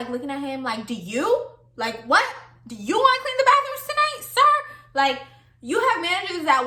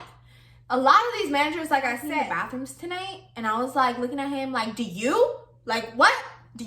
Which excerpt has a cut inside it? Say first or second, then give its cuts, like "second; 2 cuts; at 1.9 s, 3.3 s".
second; 1 cut; at 2.0 s